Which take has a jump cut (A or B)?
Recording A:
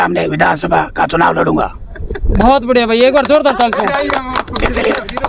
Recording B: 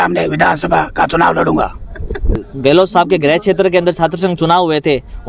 B